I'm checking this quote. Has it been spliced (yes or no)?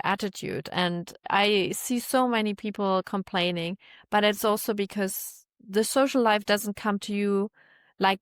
yes